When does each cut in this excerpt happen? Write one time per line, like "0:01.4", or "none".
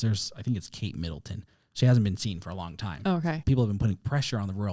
0:03.4